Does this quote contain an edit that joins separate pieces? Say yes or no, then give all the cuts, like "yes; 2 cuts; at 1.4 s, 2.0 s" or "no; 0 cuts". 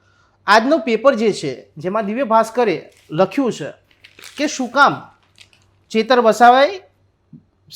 no; 0 cuts